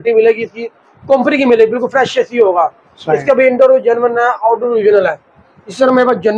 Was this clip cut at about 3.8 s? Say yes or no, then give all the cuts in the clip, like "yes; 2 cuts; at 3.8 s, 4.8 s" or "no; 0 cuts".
no; 0 cuts